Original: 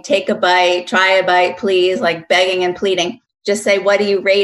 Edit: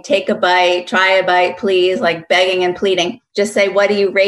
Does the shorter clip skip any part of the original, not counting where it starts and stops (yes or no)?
yes